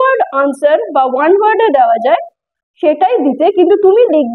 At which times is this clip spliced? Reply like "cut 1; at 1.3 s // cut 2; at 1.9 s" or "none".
none

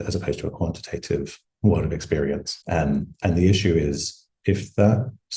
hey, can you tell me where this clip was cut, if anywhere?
cut 1; at 2.5 s // cut 2; at 4.3 s

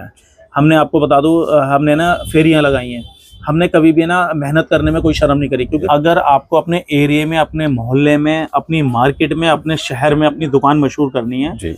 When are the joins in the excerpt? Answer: cut 1; at 5.8 s

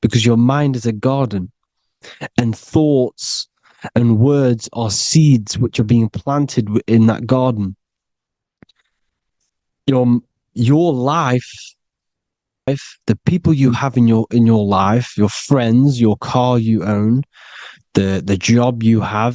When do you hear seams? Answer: cut 1; at 12.7 s

